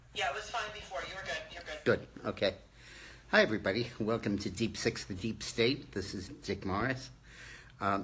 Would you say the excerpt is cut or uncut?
uncut